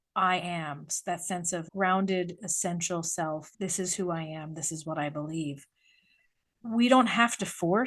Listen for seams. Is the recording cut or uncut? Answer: cut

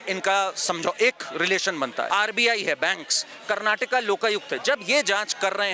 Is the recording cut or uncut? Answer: cut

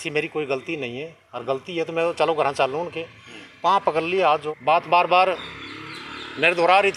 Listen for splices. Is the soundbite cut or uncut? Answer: cut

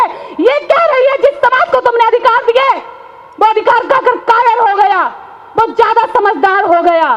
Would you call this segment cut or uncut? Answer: uncut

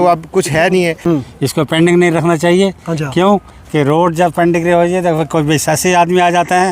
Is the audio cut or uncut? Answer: cut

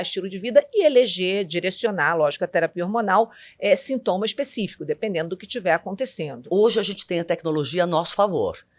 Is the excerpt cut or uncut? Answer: cut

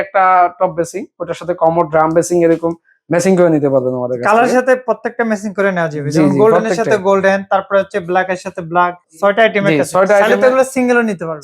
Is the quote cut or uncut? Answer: cut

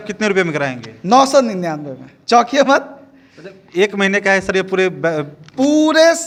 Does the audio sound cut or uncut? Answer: uncut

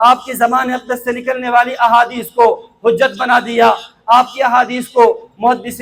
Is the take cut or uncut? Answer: uncut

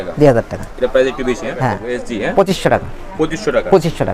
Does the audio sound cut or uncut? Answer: cut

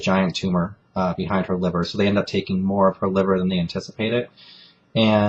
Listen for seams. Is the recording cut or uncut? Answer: cut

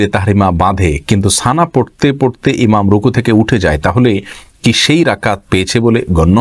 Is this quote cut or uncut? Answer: uncut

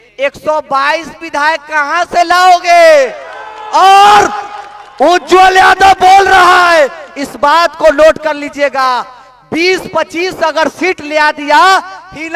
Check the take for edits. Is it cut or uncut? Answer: uncut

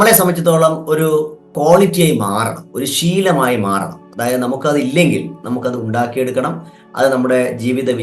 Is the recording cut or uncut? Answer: cut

